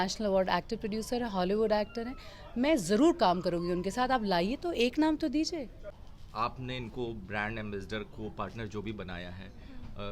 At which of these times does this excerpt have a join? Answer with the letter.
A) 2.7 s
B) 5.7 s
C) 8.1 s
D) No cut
B